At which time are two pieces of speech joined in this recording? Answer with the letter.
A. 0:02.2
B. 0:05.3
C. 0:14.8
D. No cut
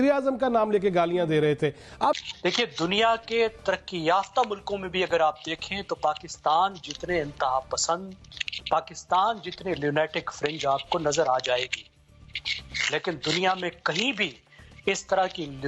A